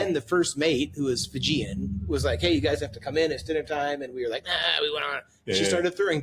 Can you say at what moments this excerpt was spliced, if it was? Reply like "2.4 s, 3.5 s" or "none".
none